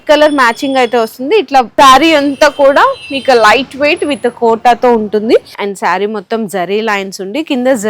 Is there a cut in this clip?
yes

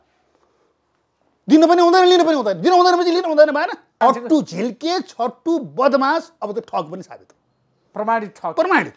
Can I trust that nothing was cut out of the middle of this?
no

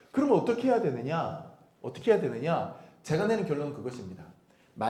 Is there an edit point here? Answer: no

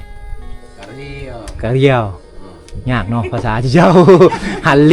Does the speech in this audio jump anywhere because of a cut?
no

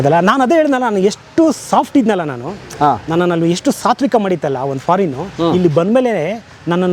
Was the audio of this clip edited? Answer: no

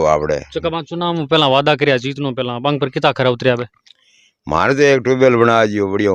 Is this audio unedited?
yes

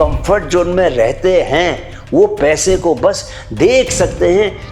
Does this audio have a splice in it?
no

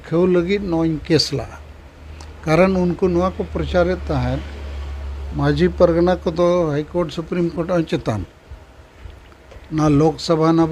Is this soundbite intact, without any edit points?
yes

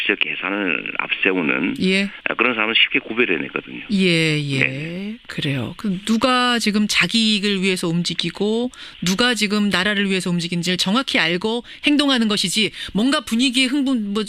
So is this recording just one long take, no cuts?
no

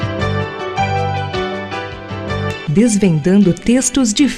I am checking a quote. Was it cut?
no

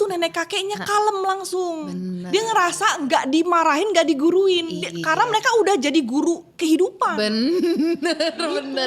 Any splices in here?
no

